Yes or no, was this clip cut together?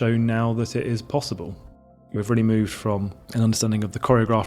yes